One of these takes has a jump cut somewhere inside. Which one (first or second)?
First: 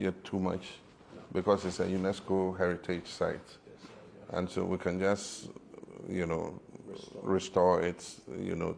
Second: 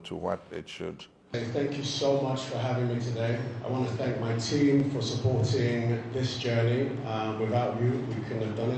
second